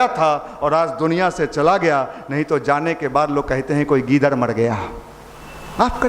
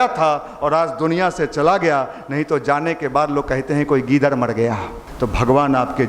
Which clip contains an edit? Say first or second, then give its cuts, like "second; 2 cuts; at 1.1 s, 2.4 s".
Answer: second; 1 cut; at 5.0 s